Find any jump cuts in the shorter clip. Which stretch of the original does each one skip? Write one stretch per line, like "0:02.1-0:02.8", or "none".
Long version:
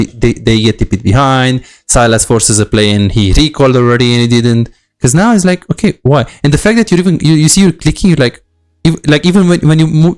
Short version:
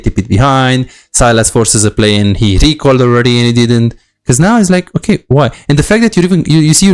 none